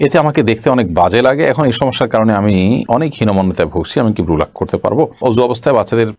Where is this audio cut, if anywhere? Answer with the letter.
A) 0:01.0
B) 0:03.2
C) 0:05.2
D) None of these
C